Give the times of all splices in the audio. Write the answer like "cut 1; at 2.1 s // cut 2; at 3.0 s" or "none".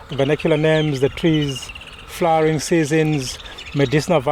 none